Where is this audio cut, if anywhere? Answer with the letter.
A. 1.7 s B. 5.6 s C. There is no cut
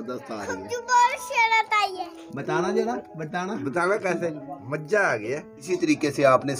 B